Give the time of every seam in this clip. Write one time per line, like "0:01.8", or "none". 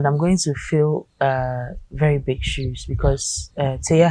none

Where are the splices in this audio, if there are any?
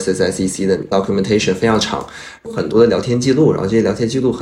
0:00.8
0:02.5

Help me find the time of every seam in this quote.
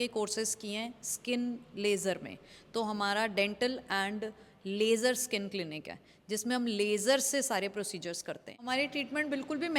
0:08.6

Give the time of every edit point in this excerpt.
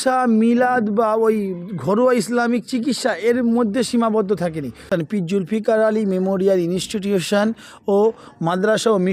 0:04.9

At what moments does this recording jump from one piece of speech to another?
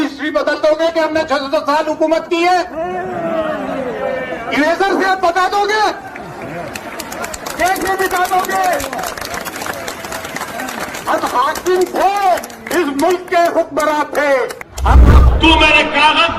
0:15.1

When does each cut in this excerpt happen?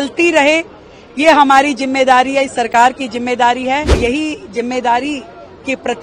0:04.0

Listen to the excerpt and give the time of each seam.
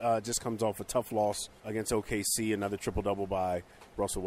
0:01.5

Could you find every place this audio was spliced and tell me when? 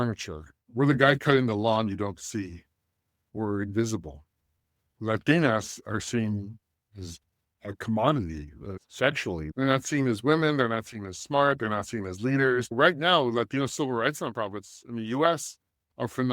0:12.7

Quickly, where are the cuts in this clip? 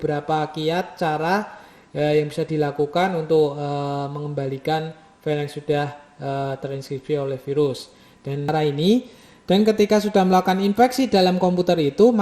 0:08.5

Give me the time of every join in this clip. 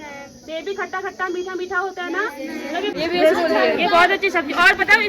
0:02.9

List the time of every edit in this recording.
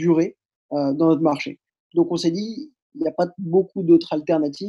0:01.7

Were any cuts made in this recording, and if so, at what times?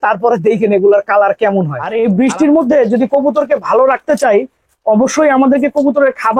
0:01.8

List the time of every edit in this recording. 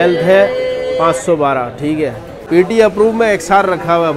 0:02.4

